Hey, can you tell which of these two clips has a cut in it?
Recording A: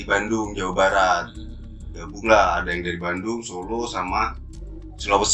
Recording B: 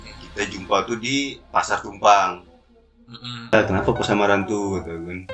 B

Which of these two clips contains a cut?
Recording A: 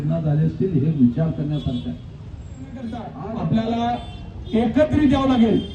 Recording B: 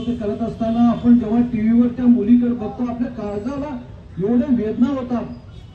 A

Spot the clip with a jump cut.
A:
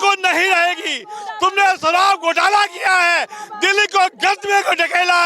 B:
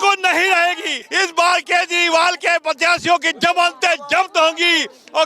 B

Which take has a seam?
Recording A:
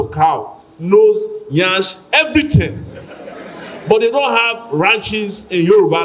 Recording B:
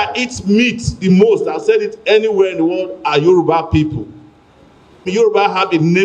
B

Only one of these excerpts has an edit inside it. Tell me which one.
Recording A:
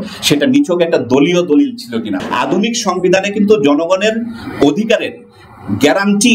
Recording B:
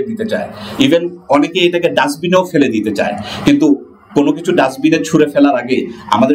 A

